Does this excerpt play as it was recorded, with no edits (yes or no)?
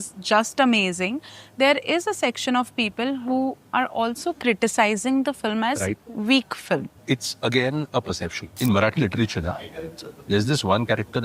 no